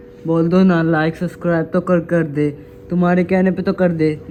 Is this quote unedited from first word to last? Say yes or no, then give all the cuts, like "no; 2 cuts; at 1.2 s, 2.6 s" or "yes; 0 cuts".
yes; 0 cuts